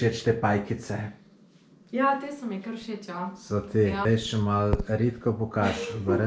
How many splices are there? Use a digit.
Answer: 1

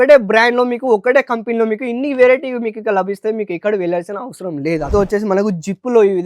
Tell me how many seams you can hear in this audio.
1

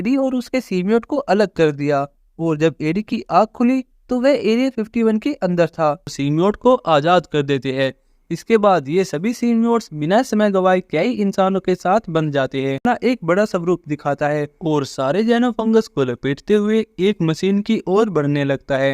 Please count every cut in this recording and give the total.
2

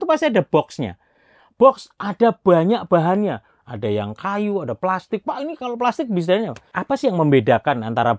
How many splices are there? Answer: 1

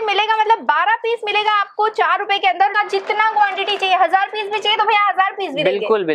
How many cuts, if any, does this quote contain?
1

